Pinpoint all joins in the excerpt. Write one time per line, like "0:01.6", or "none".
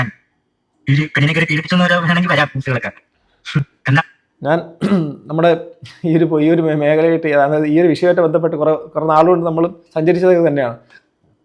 none